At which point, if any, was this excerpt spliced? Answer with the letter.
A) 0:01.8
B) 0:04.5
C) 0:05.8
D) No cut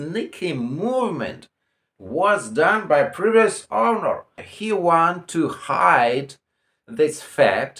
B